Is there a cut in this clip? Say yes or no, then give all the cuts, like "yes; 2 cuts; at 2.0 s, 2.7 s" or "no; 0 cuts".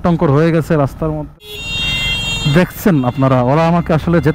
yes; 1 cut; at 1.2 s